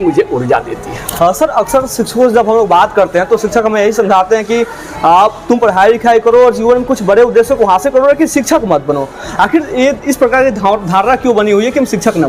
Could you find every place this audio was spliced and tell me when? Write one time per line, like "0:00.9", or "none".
none